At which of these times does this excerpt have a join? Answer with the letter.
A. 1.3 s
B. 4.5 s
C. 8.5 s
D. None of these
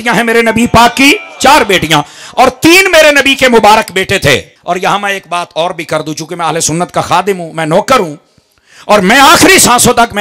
B